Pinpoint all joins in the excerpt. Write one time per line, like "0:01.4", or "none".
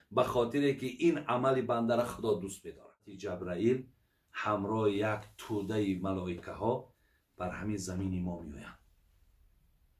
0:03.2